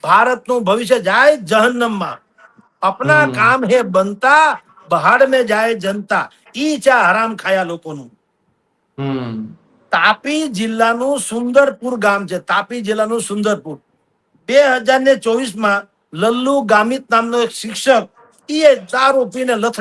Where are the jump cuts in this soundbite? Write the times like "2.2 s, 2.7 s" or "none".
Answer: none